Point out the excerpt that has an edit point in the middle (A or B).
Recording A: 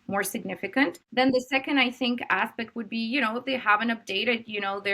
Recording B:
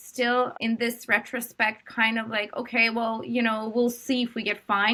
A